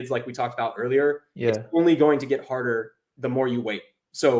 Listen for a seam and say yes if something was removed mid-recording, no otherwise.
no